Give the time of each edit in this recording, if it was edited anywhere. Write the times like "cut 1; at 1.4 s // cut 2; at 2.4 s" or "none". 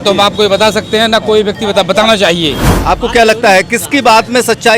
cut 1; at 2.7 s